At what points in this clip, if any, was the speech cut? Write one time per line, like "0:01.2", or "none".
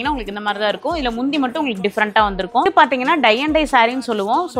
0:02.7